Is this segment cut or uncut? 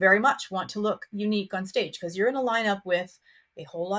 uncut